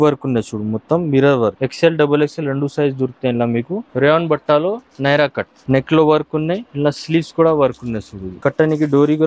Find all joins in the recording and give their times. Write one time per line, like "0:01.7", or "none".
0:01.6
0:03.9
0:05.5
0:06.7
0:08.3